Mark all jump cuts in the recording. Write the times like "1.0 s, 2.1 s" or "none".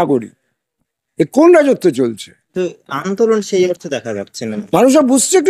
none